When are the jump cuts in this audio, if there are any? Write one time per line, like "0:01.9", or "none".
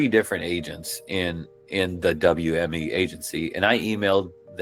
none